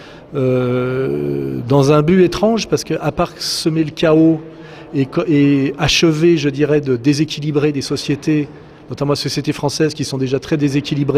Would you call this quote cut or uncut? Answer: uncut